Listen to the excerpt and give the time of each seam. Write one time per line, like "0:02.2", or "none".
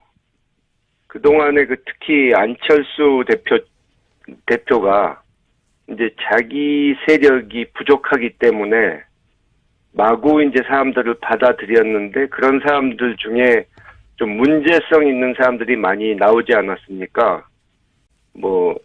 none